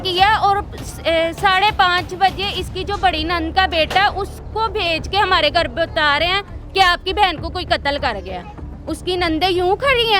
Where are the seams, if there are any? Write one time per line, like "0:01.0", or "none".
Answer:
0:08.5

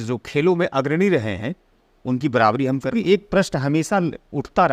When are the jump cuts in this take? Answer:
0:02.9

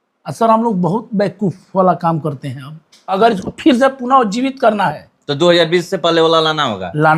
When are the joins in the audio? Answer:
0:03.1

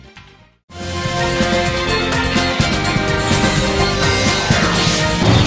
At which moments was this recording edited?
none

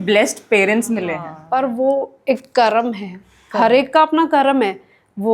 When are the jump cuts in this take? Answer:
0:01.3

